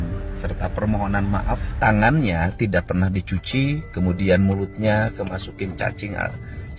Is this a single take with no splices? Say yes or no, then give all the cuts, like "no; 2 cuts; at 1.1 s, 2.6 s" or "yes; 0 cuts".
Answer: yes; 0 cuts